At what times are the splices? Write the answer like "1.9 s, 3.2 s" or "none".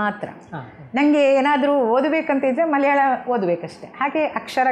none